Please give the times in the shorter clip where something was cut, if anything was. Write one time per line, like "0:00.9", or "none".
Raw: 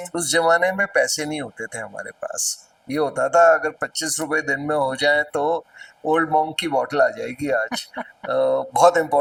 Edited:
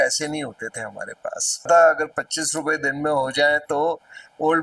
0:01.7